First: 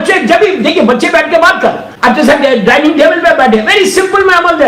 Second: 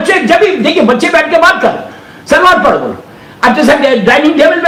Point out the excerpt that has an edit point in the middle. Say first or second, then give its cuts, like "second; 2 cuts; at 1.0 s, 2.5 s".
first; 1 cut; at 1.9 s